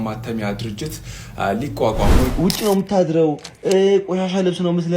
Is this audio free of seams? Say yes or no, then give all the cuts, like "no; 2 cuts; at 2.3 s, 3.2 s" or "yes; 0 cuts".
no; 1 cut; at 2.3 s